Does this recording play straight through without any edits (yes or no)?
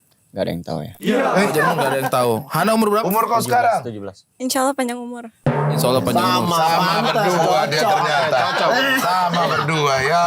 yes